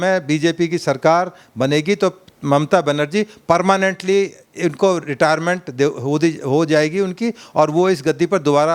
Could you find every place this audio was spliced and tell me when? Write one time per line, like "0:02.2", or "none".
none

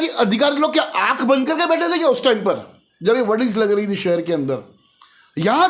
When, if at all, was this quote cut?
none

